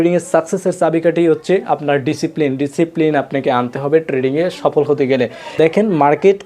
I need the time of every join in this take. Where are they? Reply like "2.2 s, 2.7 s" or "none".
5.4 s

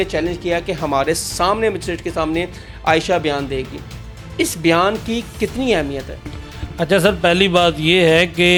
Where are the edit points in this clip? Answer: none

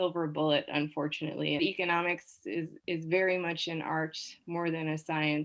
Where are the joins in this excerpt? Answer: 1.6 s

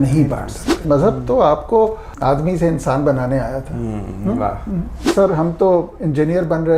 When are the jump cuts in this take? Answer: 0.8 s, 2.1 s, 5.1 s

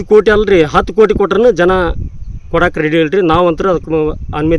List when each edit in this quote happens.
none

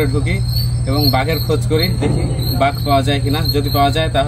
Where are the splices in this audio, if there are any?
none

